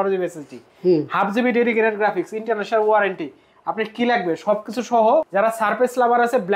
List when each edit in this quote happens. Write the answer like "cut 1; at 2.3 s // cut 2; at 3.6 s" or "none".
cut 1; at 5.3 s